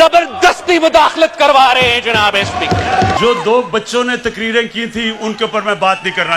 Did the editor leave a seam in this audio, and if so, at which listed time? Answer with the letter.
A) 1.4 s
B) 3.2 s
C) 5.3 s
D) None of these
B